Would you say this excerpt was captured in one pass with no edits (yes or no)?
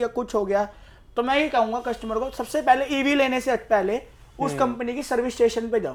yes